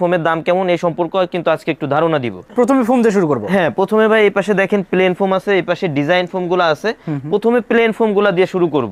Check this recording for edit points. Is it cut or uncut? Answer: uncut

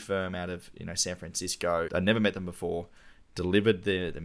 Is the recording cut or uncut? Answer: cut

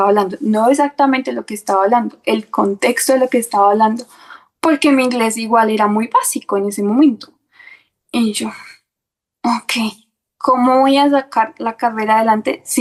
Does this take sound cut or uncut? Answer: uncut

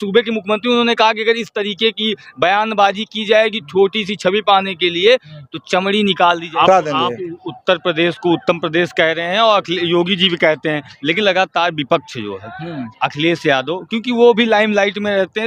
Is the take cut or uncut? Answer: cut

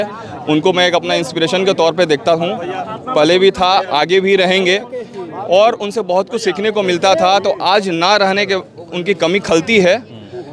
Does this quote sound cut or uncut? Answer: uncut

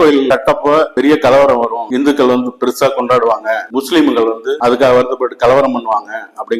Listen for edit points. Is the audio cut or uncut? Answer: uncut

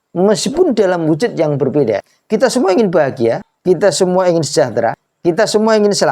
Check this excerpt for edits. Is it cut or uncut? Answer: cut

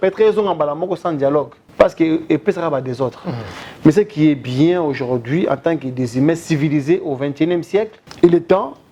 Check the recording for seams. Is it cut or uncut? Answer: cut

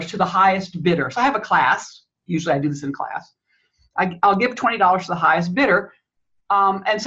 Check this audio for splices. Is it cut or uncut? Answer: uncut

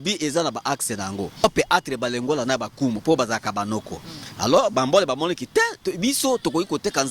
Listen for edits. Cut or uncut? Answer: cut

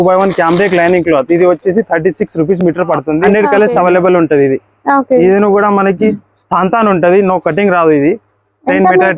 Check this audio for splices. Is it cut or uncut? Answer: cut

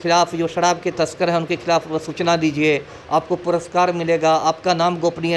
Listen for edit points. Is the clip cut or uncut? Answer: uncut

